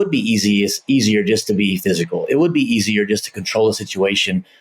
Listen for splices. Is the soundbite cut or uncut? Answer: uncut